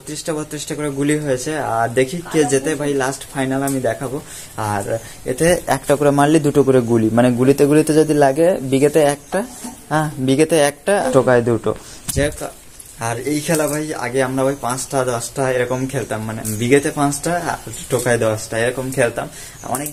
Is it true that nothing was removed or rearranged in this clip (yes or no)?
no